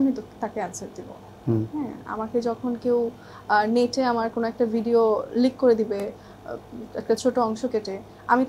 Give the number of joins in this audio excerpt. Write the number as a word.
zero